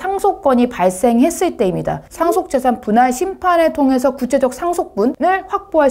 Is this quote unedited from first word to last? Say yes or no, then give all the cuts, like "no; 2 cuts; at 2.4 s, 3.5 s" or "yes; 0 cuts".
no; 1 cut; at 2.1 s